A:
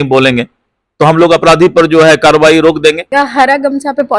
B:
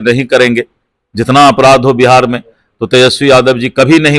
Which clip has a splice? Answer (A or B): A